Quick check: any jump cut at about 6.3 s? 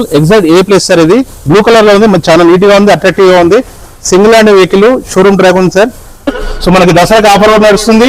yes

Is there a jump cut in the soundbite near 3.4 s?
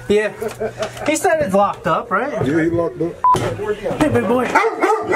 yes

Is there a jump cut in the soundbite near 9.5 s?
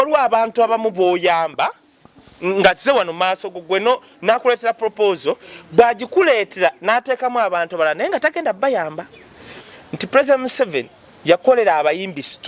yes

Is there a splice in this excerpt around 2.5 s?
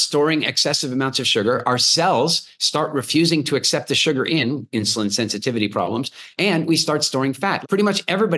no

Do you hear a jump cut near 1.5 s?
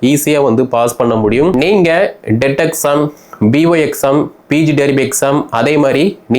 yes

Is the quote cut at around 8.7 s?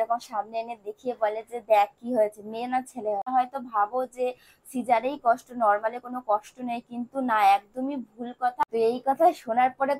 yes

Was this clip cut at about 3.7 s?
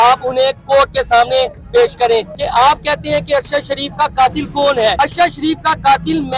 no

